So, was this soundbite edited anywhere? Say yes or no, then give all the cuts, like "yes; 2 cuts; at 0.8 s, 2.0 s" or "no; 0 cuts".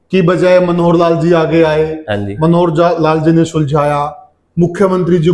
no; 0 cuts